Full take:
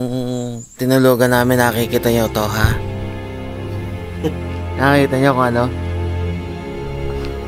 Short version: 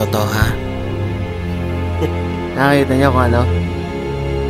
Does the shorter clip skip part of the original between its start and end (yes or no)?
yes